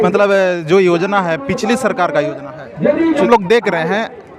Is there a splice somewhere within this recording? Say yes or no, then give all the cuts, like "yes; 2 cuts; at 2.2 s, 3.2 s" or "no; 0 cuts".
yes; 1 cut; at 3.3 s